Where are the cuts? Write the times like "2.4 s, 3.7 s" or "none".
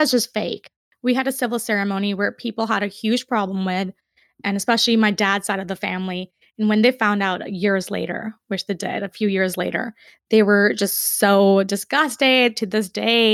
none